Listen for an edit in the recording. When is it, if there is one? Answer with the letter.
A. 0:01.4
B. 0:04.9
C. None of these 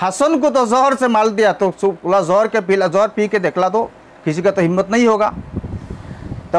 C